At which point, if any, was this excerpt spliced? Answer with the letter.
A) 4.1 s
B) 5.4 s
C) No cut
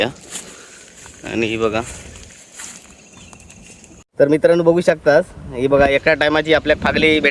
A